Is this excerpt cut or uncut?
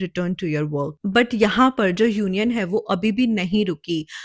uncut